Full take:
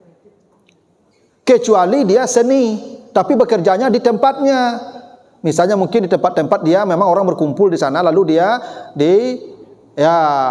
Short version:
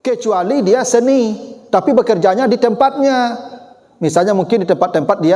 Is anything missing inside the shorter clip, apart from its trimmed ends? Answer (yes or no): no